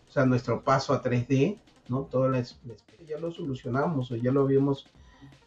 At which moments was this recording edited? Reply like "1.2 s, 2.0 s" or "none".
2.9 s